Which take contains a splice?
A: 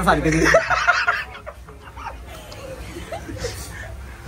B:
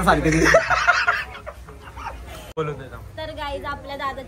B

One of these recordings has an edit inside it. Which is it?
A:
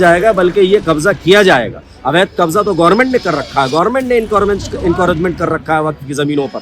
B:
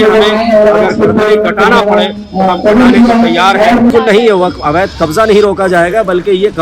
B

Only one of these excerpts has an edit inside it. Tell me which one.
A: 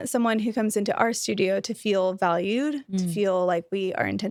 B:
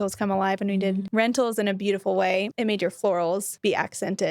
B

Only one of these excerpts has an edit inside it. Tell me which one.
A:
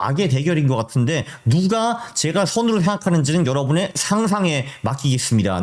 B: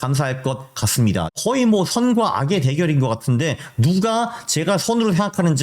B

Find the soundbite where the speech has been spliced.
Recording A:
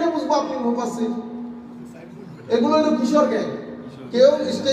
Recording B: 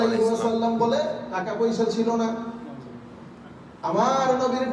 B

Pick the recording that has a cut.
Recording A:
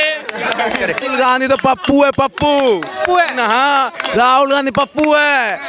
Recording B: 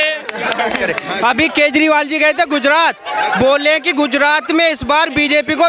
A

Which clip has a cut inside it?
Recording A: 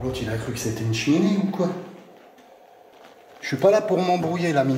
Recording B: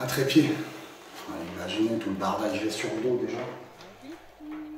A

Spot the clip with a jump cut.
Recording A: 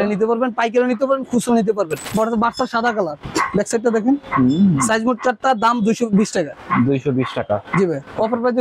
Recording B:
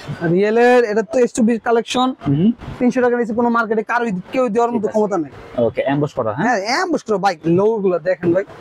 A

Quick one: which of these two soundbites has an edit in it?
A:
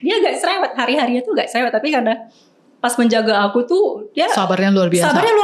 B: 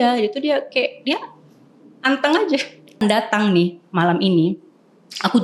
B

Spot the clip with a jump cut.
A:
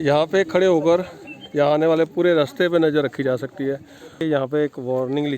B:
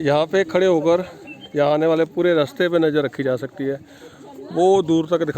A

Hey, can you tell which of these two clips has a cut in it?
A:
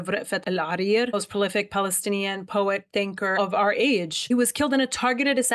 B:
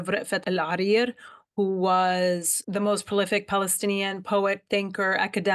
A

